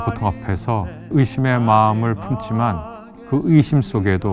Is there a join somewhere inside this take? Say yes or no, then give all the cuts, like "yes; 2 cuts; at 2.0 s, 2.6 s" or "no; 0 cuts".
yes; 1 cut; at 1.1 s